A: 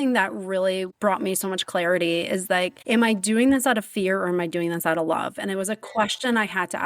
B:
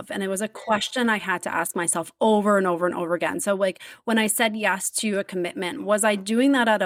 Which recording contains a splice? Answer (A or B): A